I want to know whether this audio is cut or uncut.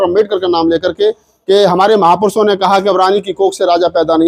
uncut